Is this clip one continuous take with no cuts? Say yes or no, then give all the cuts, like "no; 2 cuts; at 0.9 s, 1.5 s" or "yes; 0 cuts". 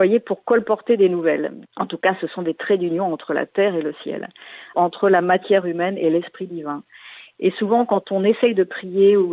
no; 2 cuts; at 1.6 s, 4.7 s